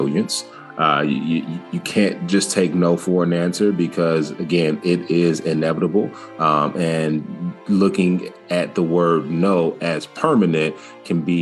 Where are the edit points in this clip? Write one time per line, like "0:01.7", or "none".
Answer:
none